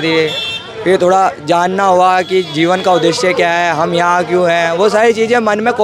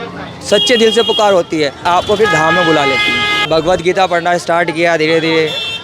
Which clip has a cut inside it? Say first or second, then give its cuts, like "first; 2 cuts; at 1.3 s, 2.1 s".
second; 2 cuts; at 1.8 s, 3.5 s